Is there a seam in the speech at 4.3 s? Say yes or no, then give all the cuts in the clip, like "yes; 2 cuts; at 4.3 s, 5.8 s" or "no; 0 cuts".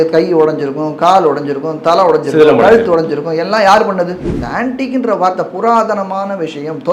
yes; 1 cut; at 4.3 s